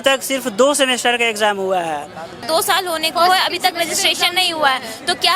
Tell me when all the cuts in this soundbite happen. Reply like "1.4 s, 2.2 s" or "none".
2.5 s